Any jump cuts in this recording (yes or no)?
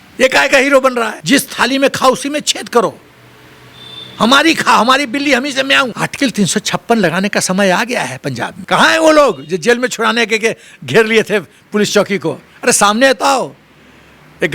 yes